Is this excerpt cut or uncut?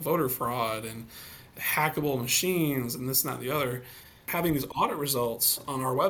cut